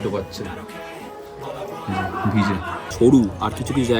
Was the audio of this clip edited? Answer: yes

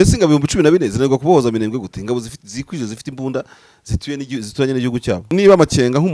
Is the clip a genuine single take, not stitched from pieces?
no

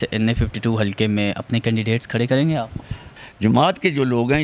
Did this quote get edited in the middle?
yes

